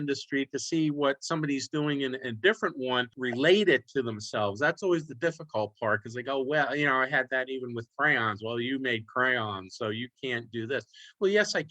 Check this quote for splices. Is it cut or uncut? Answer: cut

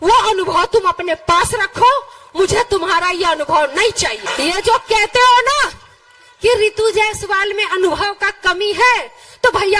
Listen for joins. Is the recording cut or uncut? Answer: cut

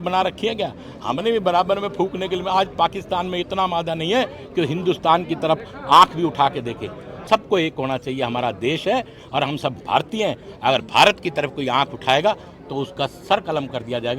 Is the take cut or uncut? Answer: cut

